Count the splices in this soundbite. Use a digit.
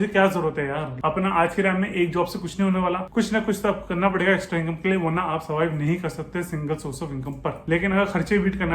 3